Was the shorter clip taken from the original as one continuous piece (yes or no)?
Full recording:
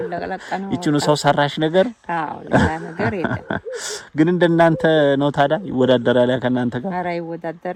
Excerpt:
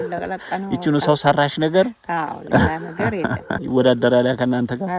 no